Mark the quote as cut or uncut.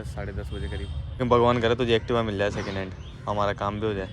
cut